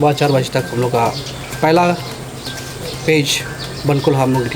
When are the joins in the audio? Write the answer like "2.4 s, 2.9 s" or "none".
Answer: none